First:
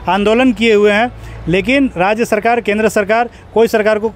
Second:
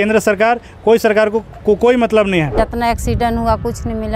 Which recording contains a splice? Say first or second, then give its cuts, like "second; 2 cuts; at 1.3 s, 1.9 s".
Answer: second; 1 cut; at 2.5 s